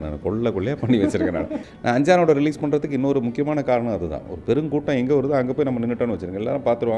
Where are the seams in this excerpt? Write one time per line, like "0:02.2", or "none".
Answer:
0:01.6